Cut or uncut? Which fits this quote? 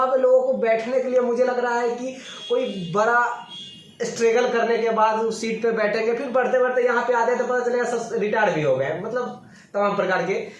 uncut